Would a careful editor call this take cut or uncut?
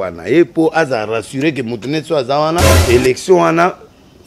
cut